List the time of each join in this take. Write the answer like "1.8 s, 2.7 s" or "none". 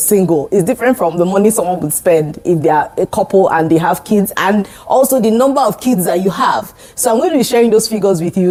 none